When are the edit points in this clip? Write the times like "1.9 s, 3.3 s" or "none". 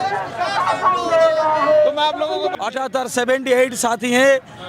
2.5 s